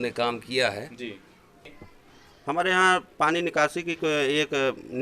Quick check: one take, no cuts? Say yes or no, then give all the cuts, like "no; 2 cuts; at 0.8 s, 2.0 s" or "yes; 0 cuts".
no; 1 cut; at 1.5 s